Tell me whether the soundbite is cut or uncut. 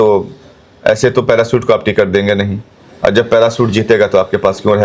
uncut